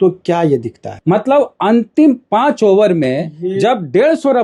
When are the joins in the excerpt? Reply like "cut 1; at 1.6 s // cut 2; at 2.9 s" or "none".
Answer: none